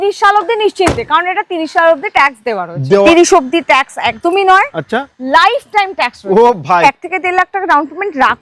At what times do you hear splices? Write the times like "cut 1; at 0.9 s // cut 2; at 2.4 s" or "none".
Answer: cut 1; at 3.1 s // cut 2; at 6.8 s